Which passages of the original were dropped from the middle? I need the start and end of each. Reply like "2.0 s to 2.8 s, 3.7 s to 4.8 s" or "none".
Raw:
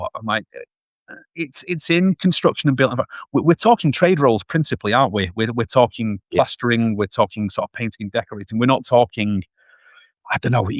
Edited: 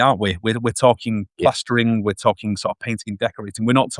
none